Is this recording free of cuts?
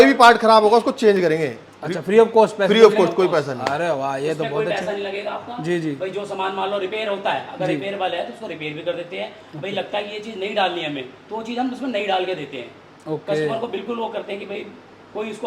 yes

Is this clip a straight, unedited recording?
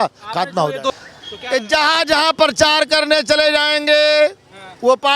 no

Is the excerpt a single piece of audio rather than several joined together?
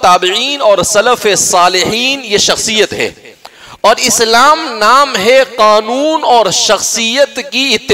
yes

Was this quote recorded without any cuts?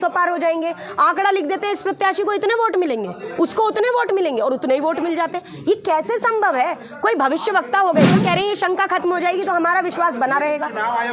no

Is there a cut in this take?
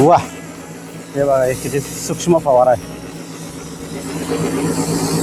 no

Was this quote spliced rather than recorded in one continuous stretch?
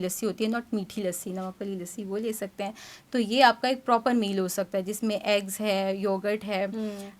no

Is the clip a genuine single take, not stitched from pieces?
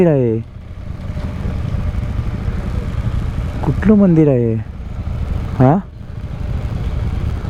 yes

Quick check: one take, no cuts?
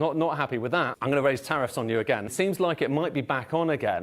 no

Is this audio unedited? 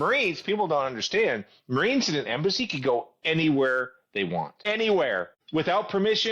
no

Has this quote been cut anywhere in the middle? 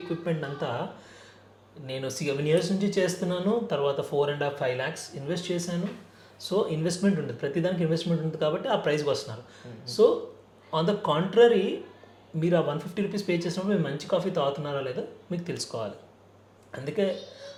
no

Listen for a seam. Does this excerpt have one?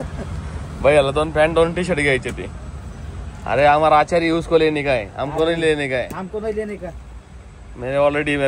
no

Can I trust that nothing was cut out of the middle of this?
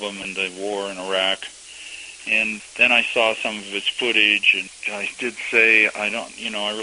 no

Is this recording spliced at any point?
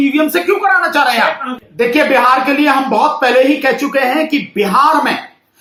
no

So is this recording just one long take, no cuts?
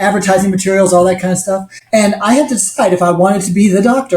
no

